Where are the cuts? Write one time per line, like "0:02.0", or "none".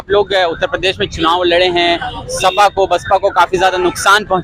none